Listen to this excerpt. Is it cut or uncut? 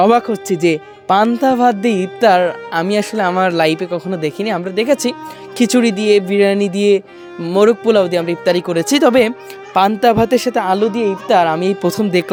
uncut